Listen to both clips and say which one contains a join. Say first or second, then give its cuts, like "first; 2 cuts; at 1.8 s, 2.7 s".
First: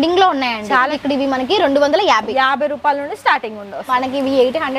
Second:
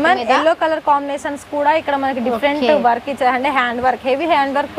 first; 2 cuts; at 1.0 s, 3.9 s